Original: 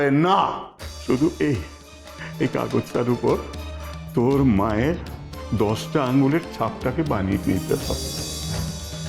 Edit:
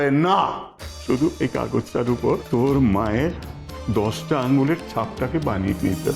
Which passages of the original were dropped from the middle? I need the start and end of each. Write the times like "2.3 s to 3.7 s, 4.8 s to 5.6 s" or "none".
1.3 s to 2.3 s, 3.4 s to 4.1 s